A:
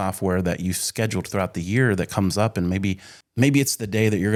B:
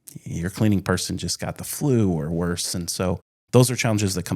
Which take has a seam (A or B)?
B